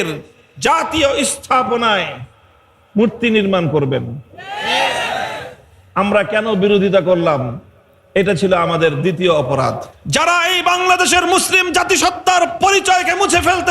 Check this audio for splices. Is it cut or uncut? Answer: cut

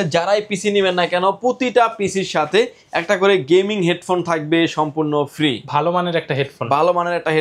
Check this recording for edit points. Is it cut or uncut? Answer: uncut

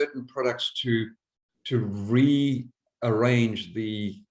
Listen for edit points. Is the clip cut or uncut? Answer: uncut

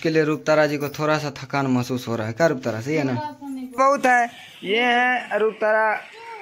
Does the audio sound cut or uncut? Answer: cut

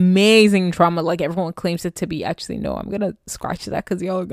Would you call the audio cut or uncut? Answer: uncut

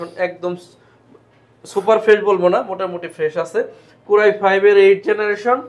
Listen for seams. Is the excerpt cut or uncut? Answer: uncut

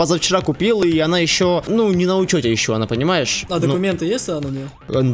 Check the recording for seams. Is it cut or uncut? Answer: cut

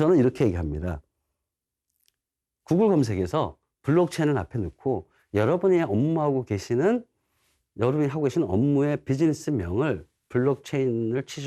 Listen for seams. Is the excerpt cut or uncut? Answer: uncut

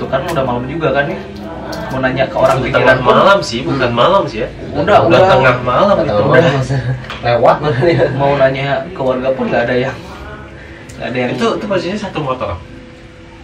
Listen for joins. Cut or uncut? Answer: uncut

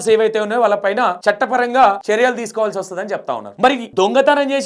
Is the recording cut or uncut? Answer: cut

